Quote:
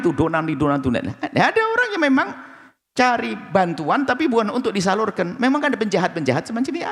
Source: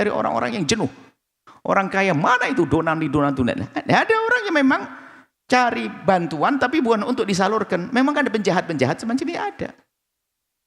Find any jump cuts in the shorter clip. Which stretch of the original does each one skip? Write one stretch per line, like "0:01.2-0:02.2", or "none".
none